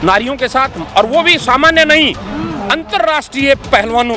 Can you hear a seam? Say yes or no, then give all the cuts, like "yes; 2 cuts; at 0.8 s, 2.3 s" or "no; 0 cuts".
no; 0 cuts